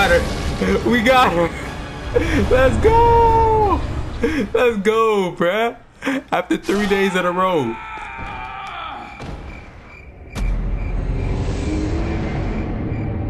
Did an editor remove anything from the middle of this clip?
no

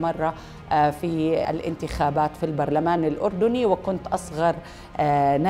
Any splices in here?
yes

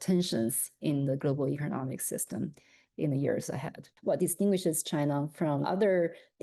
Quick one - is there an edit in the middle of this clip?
yes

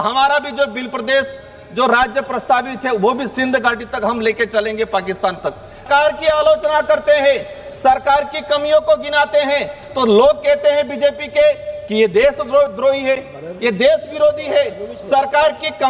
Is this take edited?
yes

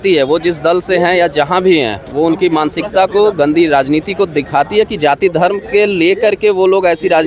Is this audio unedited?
yes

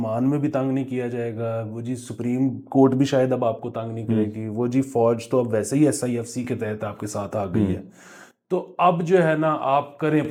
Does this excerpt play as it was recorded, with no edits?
yes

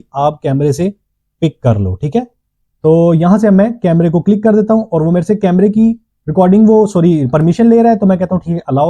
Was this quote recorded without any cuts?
yes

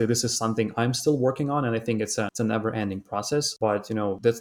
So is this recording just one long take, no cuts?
no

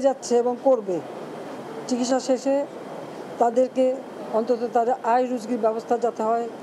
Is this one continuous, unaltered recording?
yes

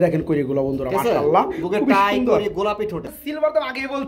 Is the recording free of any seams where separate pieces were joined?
no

